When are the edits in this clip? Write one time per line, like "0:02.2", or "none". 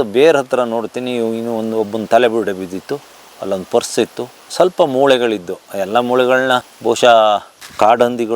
none

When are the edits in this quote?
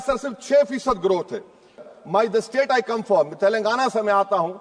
0:01.9

